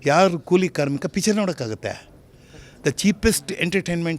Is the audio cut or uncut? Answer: uncut